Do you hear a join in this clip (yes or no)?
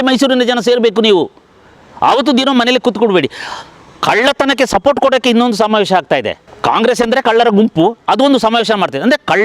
yes